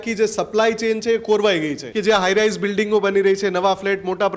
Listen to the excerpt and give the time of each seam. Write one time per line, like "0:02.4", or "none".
0:01.8